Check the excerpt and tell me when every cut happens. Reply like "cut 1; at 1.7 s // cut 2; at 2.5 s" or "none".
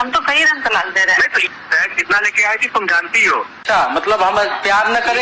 cut 1; at 1.5 s // cut 2; at 3.6 s